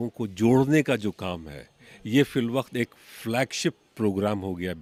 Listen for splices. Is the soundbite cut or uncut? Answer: uncut